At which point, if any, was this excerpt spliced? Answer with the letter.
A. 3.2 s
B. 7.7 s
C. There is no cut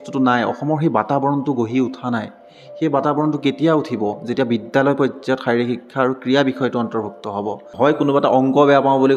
B